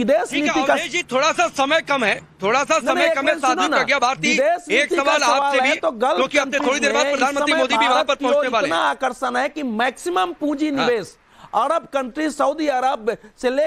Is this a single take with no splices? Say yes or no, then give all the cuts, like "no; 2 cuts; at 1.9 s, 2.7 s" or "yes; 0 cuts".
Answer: no; 1 cut; at 12.7 s